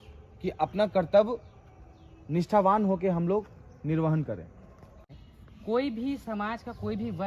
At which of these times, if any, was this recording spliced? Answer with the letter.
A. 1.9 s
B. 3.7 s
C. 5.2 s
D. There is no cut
C